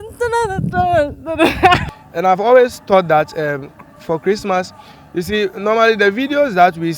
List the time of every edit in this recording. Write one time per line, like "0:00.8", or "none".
0:01.9

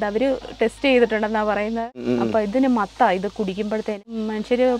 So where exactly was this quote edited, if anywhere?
0:02.0
0:04.0

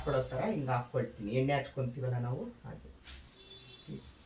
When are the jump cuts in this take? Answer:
none

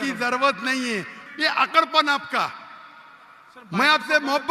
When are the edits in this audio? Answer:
0:01.2

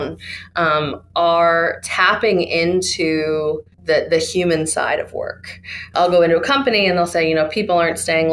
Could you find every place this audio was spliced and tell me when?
0:03.7
0:05.9

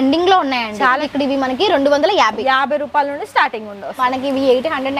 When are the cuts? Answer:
0:01.1
0:04.0

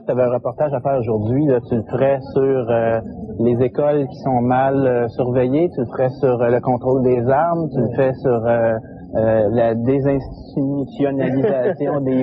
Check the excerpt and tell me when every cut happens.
0:01.2

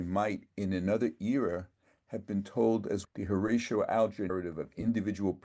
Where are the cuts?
0:03.1
0:04.3

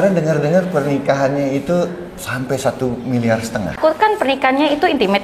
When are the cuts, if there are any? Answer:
0:03.8

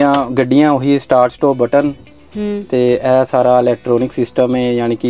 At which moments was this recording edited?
none

